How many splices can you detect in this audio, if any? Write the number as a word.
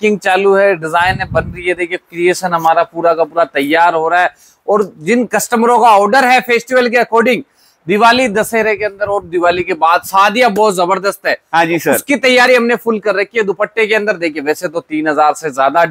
zero